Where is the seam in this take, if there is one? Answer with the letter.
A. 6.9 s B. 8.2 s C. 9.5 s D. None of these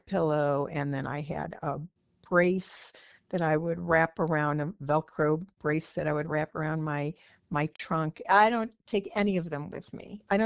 B